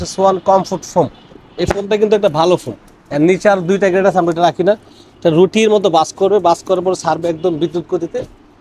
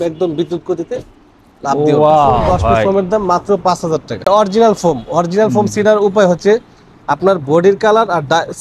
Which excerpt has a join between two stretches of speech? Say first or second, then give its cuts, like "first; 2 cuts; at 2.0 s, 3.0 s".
second; 2 cuts; at 2.8 s, 4.3 s